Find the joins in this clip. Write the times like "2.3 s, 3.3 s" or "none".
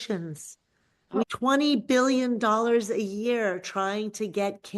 1.2 s